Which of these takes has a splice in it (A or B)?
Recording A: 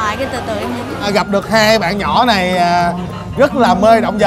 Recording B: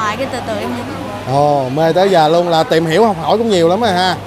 A